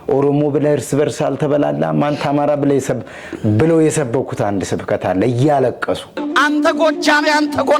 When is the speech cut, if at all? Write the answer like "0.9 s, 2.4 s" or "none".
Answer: 5.4 s, 6.2 s